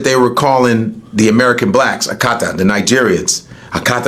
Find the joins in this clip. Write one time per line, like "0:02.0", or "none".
none